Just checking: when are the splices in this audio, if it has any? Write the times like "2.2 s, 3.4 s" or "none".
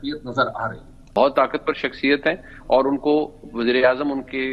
1.2 s